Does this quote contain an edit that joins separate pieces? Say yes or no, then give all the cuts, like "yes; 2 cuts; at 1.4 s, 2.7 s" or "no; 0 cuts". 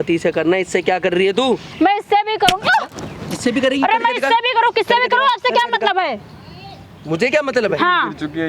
no; 0 cuts